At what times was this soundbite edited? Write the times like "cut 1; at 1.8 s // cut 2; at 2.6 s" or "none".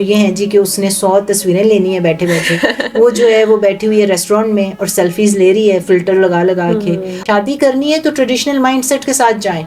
cut 1; at 7.2 s